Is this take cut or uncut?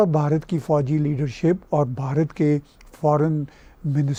uncut